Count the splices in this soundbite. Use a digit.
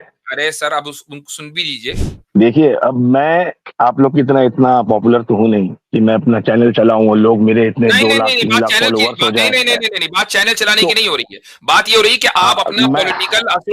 1